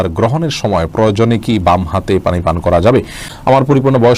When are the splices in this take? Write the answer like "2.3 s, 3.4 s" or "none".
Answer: 3.3 s